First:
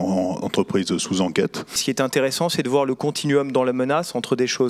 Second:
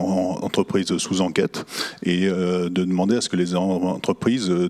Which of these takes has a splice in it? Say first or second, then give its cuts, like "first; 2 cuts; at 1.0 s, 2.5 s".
first; 1 cut; at 1.8 s